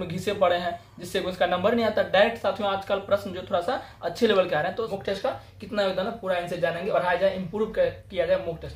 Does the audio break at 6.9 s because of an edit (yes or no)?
yes